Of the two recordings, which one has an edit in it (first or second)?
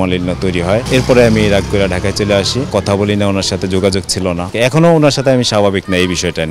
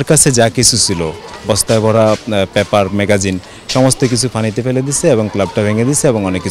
first